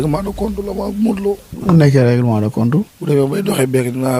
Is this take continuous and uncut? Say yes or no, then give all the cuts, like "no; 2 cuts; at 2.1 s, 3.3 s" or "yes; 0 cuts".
no; 2 cuts; at 1.5 s, 3.0 s